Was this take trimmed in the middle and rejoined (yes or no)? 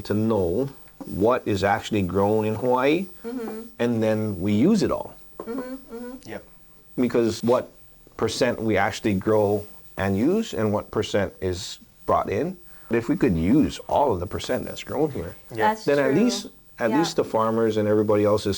yes